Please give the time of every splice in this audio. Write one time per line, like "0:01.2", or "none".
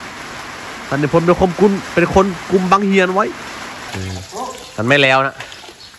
0:03.8